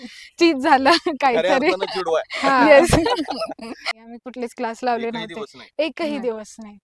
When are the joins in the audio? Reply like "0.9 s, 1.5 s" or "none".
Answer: 4.0 s